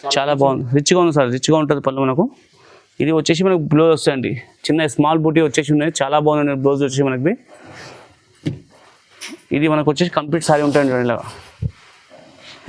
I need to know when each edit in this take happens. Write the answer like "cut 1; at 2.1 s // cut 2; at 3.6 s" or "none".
none